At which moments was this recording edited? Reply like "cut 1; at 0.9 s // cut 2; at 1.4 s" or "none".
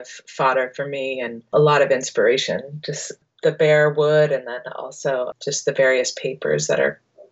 none